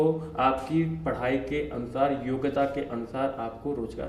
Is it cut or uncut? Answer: uncut